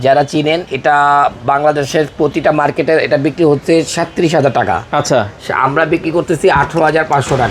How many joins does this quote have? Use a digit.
0